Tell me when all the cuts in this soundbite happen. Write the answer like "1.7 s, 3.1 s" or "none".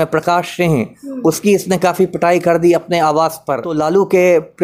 3.7 s